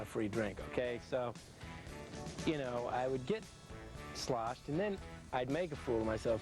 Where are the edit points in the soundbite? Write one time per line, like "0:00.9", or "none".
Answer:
none